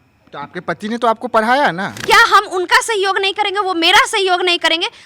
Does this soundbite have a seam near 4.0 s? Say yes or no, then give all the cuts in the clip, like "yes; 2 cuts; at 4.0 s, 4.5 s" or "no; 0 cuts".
no; 1 cut; at 1.9 s